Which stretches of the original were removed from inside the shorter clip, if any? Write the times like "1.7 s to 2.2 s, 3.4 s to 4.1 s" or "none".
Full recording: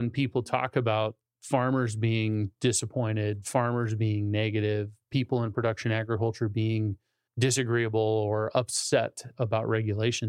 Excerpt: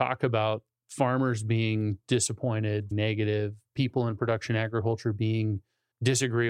3.4 s to 4.3 s